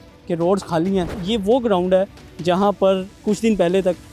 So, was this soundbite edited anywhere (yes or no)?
yes